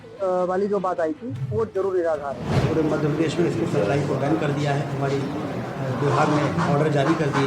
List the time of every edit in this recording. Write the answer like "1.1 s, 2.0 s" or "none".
2.5 s